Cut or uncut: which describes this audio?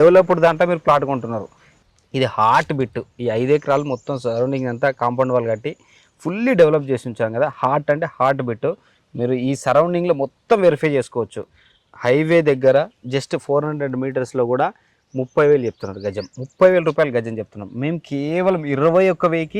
cut